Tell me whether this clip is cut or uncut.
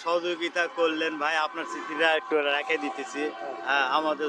uncut